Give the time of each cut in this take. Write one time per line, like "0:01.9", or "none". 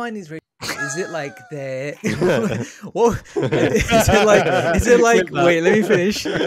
none